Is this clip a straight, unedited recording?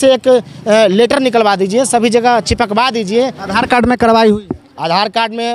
no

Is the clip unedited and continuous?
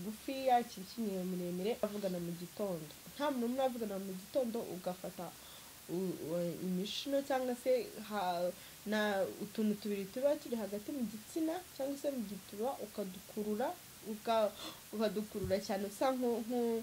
no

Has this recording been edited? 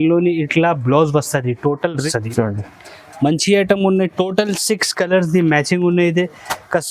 yes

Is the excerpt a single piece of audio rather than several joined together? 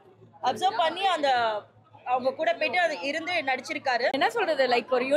no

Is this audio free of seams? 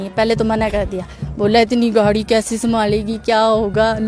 yes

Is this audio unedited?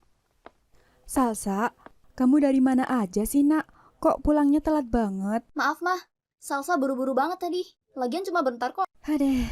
no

